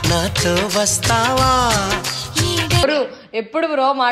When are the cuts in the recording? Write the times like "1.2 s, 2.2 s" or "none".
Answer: 2.8 s